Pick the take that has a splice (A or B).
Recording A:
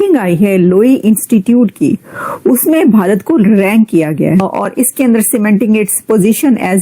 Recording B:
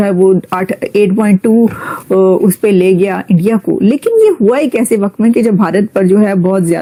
A